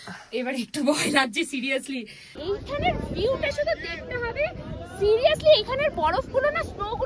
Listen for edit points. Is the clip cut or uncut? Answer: cut